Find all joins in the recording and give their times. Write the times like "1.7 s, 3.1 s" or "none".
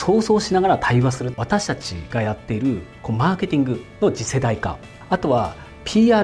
1.4 s, 4.9 s